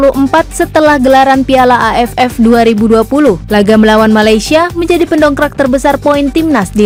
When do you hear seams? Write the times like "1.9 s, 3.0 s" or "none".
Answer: none